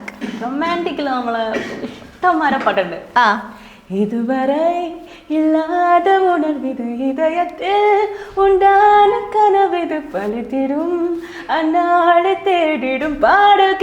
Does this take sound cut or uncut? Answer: uncut